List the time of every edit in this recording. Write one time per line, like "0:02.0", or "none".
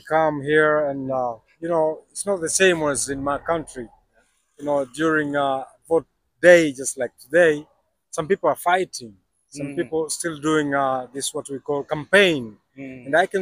none